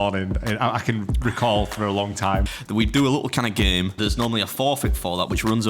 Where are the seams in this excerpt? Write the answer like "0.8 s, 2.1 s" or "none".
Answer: 2.5 s, 4.0 s